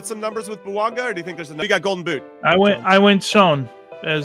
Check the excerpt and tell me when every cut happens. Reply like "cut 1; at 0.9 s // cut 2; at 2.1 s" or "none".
cut 1; at 1.6 s